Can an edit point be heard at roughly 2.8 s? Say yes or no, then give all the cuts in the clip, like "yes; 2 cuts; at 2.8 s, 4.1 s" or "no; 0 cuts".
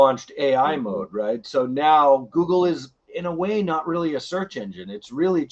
no; 0 cuts